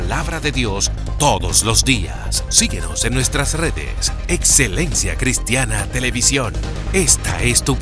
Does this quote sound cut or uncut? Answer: uncut